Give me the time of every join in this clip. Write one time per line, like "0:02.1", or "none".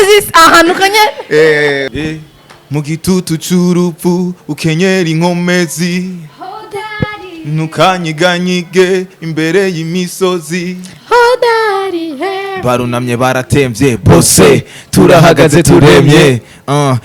0:01.9